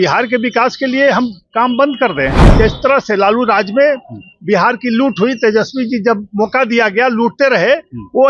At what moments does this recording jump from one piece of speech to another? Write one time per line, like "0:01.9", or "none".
0:02.4